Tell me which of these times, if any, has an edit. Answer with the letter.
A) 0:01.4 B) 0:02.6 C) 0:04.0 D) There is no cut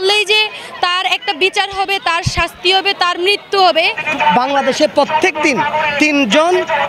C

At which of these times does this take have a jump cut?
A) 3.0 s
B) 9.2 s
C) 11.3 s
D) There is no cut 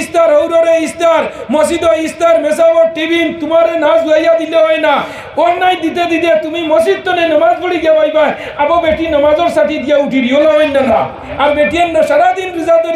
C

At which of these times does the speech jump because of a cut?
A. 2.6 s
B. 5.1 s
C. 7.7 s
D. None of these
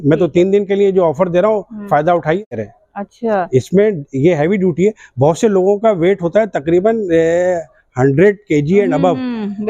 A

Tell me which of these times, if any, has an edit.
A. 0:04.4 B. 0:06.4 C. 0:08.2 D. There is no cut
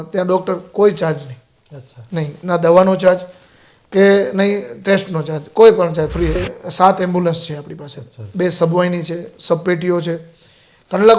B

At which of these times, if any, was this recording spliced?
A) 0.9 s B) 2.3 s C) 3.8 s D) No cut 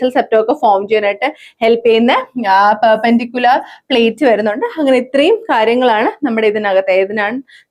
D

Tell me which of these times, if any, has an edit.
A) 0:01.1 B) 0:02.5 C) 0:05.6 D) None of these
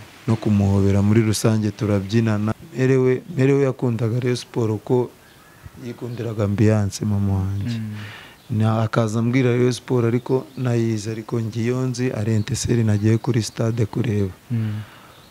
B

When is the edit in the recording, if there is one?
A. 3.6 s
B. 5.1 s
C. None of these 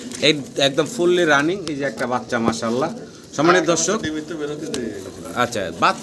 C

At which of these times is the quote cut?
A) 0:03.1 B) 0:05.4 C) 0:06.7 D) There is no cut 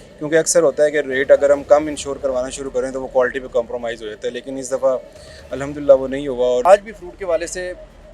C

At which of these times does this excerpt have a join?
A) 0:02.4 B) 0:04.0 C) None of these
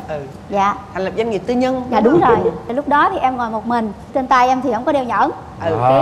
B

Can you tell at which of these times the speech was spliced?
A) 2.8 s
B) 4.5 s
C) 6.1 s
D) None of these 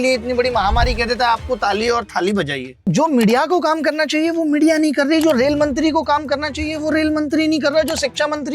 A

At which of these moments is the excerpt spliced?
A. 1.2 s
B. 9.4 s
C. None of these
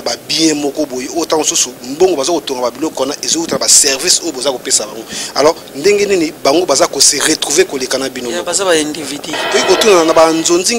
B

